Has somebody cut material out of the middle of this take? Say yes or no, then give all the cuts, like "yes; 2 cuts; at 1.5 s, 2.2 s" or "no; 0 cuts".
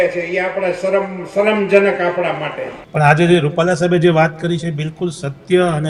yes; 1 cut; at 2.8 s